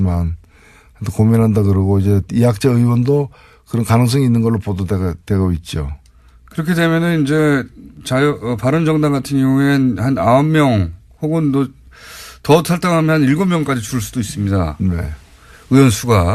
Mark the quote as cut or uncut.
cut